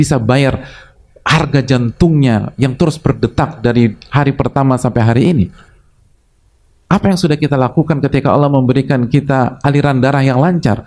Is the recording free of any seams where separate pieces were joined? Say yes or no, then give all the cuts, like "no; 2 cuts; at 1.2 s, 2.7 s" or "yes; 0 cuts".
yes; 0 cuts